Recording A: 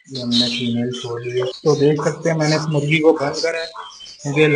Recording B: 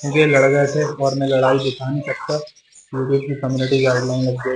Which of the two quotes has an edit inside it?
A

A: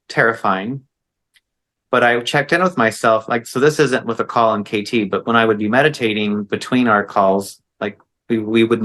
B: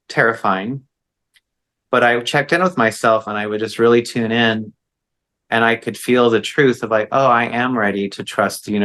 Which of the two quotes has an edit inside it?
B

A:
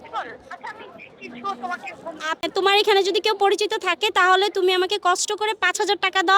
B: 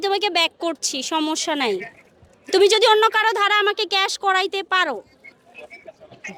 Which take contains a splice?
A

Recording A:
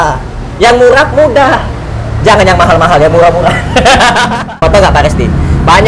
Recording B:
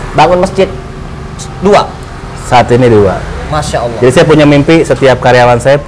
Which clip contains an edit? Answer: A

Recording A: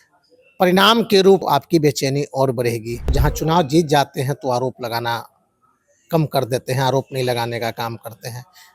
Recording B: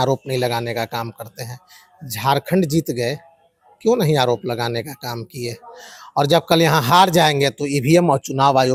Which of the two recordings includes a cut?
A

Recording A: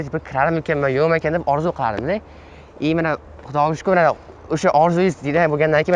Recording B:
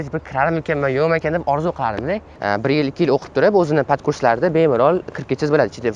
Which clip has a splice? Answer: B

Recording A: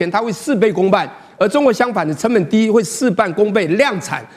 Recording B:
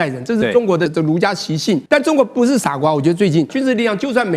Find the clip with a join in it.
B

